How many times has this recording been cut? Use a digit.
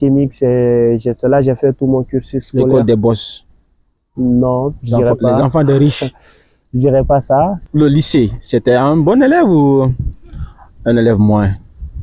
1